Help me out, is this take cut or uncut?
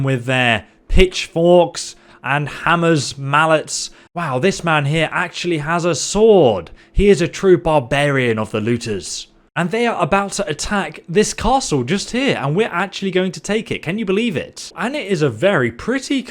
cut